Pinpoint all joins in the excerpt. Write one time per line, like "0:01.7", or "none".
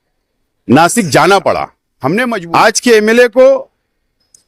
0:02.3